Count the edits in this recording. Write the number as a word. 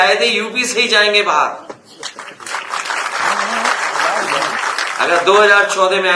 zero